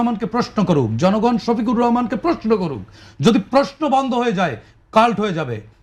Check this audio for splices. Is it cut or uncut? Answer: uncut